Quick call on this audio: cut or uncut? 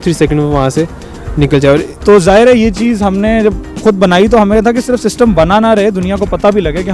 cut